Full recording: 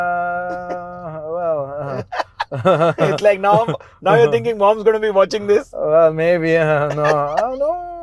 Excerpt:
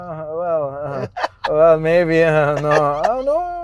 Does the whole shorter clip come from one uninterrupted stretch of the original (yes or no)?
no